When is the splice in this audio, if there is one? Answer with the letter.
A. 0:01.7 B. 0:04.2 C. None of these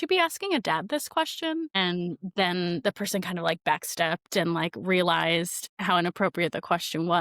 A